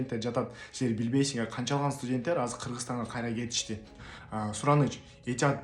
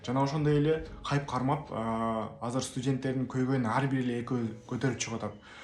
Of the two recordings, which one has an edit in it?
first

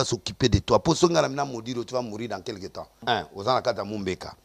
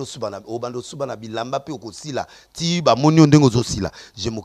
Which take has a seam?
first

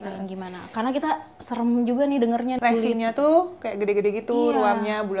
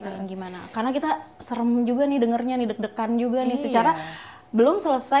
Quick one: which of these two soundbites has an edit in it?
first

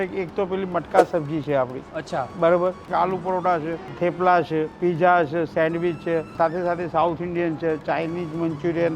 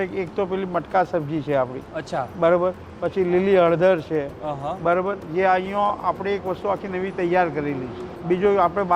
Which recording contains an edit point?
first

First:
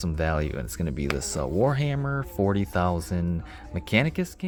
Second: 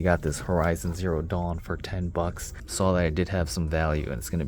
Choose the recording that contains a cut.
second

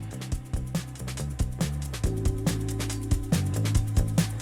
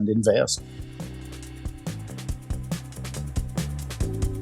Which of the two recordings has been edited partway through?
second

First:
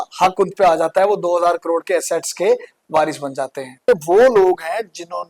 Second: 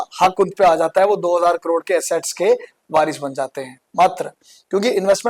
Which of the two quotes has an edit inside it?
first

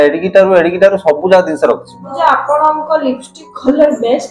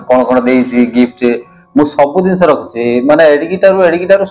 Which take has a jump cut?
first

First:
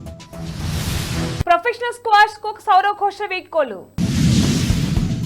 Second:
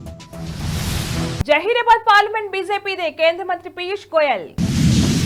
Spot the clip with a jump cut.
first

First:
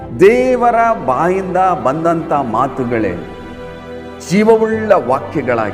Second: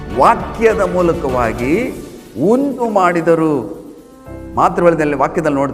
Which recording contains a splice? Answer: second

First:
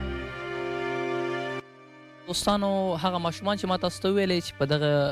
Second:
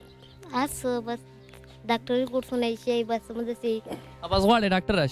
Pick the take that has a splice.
first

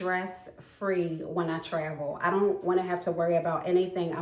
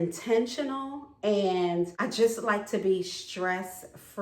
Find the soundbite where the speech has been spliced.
second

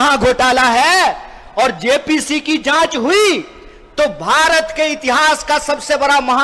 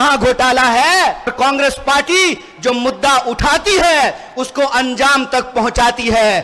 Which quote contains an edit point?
second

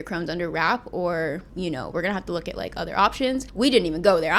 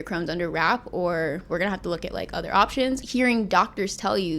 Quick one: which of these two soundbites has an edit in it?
second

